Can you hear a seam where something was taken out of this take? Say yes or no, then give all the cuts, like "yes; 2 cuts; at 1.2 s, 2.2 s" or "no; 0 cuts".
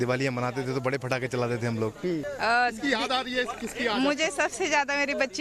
yes; 1 cut; at 2.3 s